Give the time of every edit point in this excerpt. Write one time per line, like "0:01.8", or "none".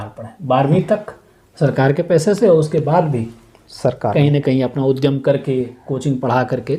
none